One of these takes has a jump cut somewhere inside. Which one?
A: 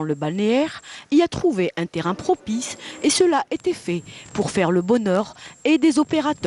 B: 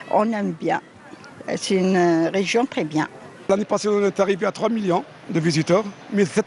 B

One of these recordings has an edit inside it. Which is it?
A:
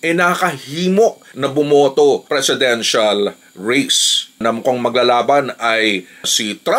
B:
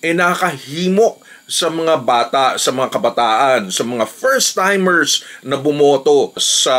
A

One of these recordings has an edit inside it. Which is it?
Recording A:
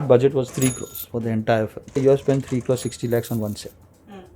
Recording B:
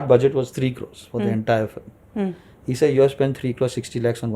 A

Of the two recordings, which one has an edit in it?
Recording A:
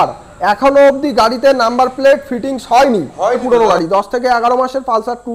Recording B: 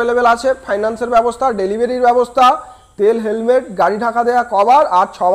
A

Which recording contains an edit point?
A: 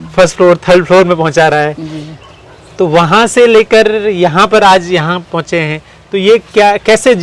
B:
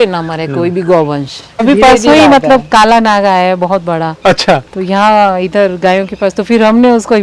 B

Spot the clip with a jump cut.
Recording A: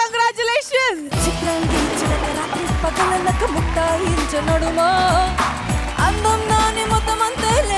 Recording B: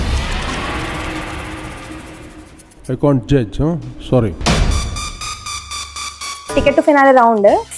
B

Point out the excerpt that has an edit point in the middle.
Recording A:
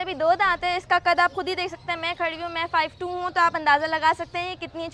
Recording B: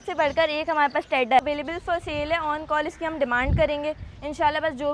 B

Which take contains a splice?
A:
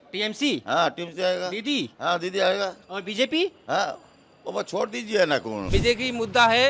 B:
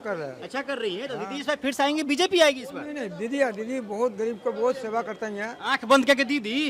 A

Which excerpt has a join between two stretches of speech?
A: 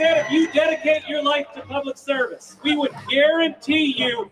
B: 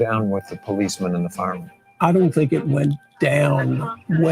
A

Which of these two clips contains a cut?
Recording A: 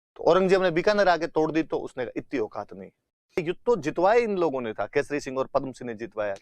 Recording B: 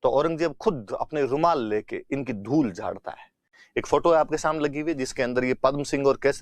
A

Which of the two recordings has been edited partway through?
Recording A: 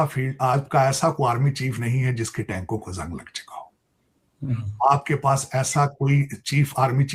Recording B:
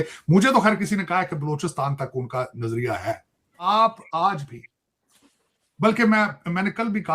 B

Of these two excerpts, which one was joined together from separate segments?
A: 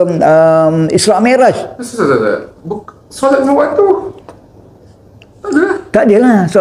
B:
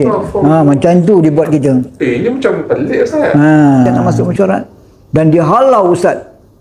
B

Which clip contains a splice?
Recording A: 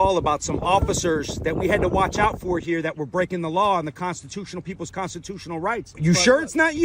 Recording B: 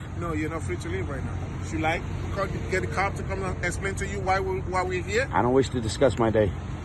A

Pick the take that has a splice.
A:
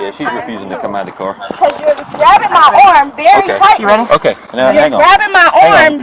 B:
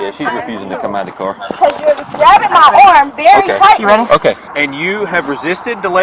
B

